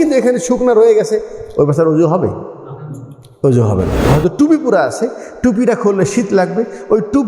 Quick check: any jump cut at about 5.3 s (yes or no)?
no